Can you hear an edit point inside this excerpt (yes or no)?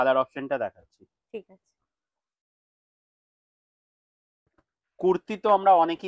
no